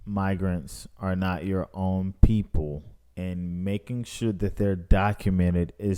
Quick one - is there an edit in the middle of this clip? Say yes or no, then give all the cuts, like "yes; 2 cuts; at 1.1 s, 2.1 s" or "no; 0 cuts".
no; 0 cuts